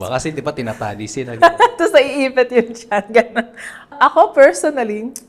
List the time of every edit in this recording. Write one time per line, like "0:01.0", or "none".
0:03.9